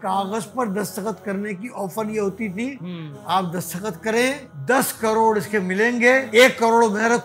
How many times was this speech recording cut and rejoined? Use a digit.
2